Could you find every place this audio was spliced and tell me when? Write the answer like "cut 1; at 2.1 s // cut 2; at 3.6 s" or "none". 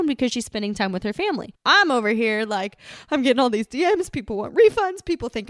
cut 1; at 1.5 s